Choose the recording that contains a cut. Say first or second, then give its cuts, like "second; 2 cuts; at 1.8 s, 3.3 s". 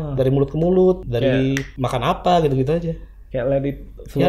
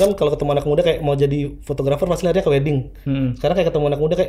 first; 1 cut; at 1.2 s